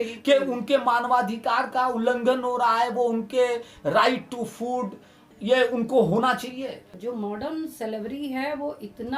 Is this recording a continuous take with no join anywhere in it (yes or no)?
no